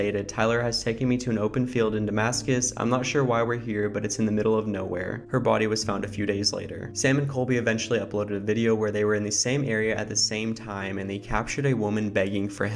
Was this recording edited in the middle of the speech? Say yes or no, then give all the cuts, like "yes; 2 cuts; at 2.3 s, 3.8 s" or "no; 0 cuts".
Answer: no; 0 cuts